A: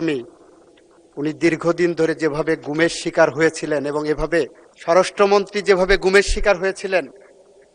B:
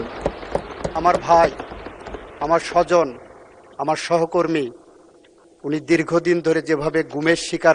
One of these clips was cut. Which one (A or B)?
A